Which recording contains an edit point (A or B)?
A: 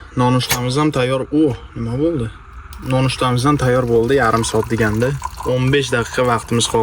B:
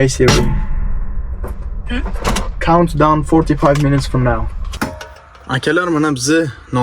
B